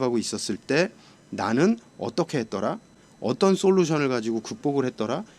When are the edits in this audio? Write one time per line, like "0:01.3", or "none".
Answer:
none